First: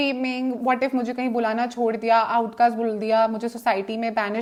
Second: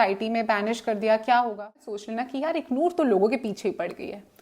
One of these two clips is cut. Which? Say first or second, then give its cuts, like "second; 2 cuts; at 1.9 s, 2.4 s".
second; 1 cut; at 1.8 s